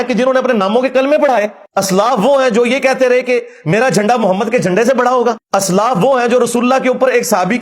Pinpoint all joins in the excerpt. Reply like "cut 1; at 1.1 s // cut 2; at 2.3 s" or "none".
cut 1; at 1.6 s // cut 2; at 5.4 s